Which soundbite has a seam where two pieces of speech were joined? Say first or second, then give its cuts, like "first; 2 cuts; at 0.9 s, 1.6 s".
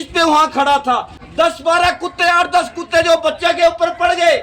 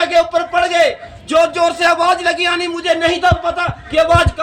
first; 1 cut; at 1.2 s